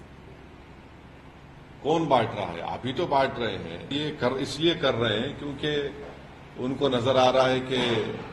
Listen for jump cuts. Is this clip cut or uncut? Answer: cut